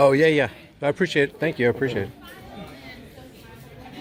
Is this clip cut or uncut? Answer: uncut